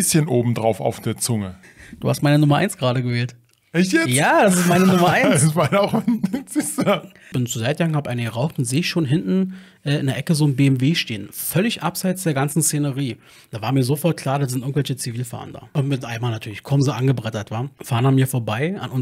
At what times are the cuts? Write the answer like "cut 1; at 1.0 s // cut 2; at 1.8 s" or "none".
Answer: cut 1; at 1.6 s // cut 2; at 7.3 s // cut 3; at 15.7 s // cut 4; at 17.8 s

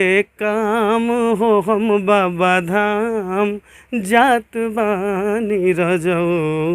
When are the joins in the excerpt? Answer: none

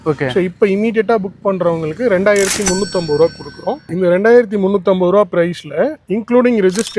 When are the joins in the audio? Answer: cut 1; at 3.9 s

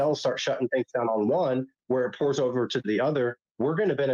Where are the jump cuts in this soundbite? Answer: none

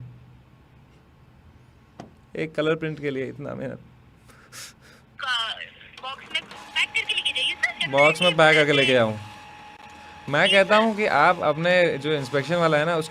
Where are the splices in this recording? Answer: cut 1; at 5.1 s

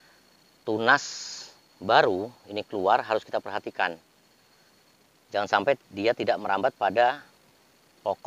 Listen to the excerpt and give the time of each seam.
none

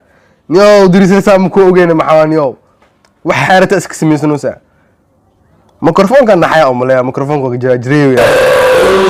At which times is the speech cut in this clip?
none

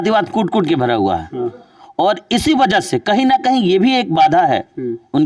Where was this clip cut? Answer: none

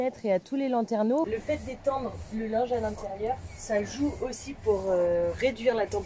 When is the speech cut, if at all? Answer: cut 1; at 1.3 s

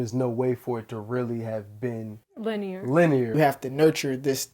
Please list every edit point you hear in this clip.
cut 1; at 3.3 s

